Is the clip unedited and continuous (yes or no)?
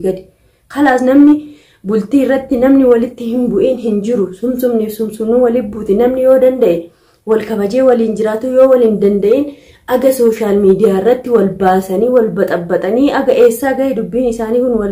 yes